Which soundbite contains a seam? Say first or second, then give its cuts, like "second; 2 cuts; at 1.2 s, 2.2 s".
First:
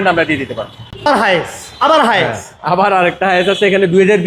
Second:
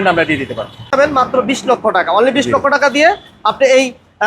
second; 1 cut; at 0.9 s